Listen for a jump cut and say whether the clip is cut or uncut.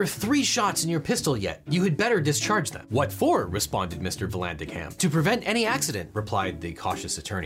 uncut